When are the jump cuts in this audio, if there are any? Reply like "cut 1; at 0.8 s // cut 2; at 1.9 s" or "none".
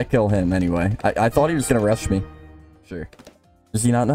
cut 1; at 3.0 s

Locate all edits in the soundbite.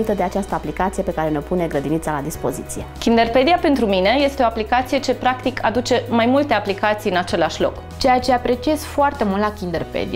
cut 1; at 2.8 s // cut 2; at 7.9 s

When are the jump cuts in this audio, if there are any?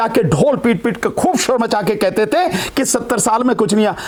none

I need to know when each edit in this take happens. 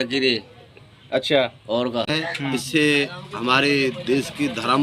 cut 1; at 2.1 s

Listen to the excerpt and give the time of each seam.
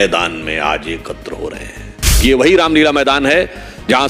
cut 1; at 2.2 s

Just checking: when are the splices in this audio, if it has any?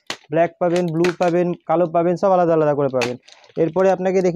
none

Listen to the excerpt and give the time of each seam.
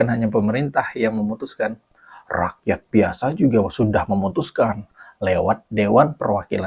none

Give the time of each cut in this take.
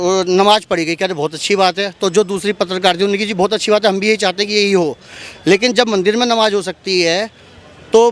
none

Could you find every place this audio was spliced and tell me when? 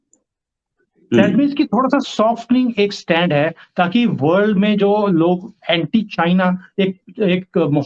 none

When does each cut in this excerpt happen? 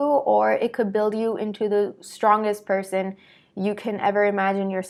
none

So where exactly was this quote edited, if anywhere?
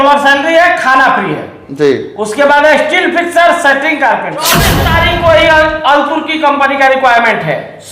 cut 1; at 4.7 s

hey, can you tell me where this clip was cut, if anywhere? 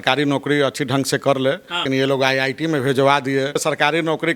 cut 1; at 1.8 s // cut 2; at 3.6 s

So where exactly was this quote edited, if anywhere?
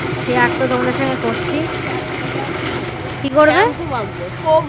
cut 1; at 3.6 s

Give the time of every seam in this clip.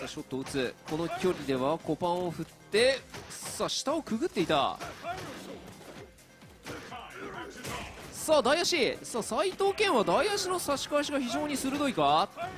cut 1; at 7.8 s

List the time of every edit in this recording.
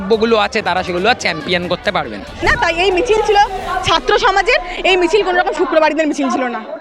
cut 1; at 2.4 s

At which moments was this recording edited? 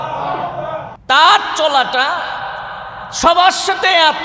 cut 1; at 0.9 s

